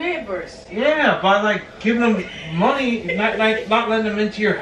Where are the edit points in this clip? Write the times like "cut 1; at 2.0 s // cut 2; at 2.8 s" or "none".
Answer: none